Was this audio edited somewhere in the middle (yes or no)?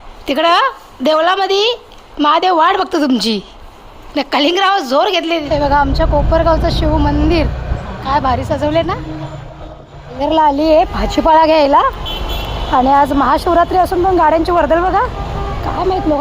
yes